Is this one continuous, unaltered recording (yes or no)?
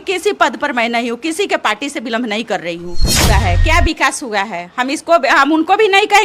no